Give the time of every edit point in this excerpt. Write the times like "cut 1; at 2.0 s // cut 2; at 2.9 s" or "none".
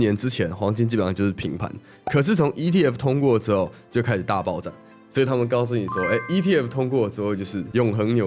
none